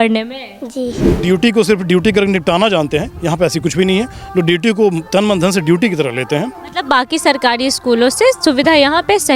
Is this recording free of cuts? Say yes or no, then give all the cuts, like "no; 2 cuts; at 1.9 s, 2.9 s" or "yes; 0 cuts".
no; 1 cut; at 1.1 s